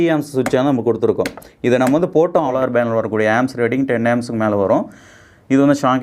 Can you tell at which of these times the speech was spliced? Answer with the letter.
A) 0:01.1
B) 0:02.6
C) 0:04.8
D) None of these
B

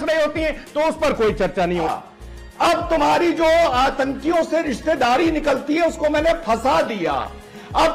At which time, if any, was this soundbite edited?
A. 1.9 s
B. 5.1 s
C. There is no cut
A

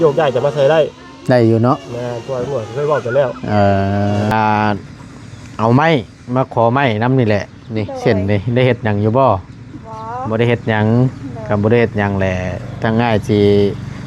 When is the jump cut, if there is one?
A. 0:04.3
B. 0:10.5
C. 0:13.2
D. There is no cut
A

